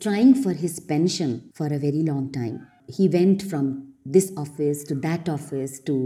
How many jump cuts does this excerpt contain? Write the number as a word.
two